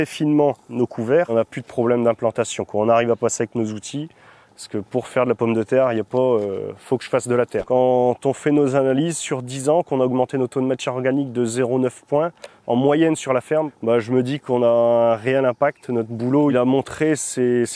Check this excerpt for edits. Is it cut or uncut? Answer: cut